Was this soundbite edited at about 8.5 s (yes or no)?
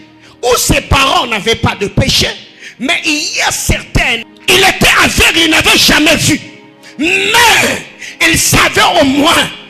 no